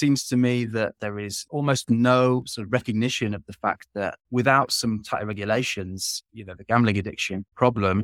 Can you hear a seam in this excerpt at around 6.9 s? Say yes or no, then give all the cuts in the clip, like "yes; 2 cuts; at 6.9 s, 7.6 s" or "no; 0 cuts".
no; 1 cut; at 1.0 s